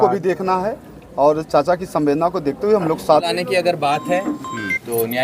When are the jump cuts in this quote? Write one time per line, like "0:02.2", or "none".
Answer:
0:03.3